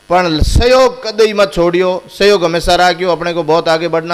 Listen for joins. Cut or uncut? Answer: uncut